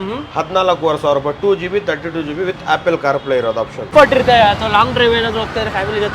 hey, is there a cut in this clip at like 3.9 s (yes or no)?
yes